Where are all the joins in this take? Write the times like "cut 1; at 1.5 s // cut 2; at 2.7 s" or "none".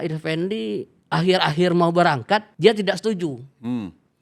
cut 1; at 0.9 s // cut 2; at 2.5 s